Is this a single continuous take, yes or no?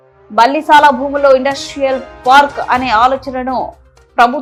yes